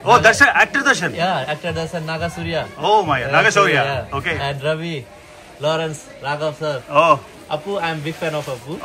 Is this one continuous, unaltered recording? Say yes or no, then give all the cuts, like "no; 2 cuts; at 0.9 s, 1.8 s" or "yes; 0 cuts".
yes; 0 cuts